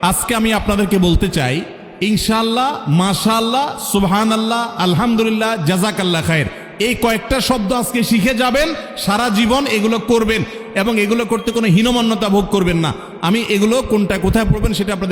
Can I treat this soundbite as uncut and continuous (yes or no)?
yes